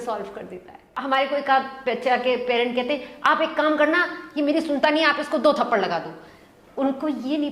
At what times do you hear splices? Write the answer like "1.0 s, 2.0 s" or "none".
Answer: 1.0 s